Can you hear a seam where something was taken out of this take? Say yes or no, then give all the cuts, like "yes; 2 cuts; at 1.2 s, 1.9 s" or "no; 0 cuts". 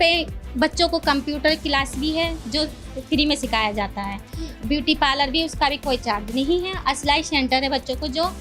no; 0 cuts